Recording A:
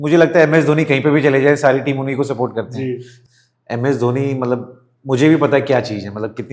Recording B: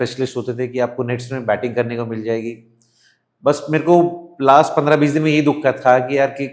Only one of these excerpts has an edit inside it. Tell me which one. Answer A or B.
A